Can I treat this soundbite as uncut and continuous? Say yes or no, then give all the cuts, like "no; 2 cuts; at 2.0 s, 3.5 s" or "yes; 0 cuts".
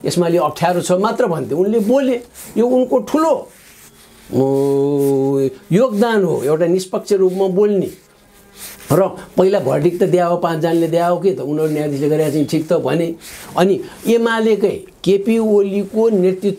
yes; 0 cuts